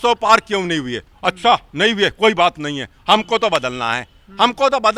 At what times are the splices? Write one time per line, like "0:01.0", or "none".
none